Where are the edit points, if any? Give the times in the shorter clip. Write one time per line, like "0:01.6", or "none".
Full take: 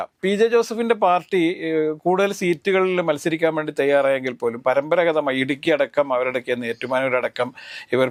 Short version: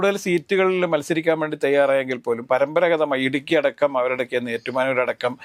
none